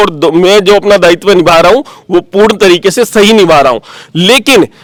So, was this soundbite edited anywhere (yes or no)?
no